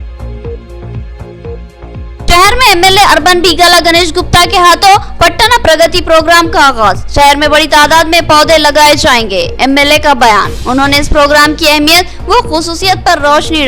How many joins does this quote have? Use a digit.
1